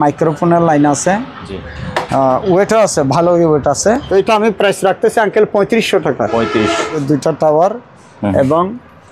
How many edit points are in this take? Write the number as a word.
two